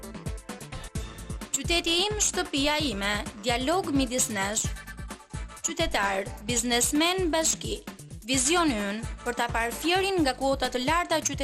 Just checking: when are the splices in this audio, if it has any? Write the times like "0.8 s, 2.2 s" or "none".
1.4 s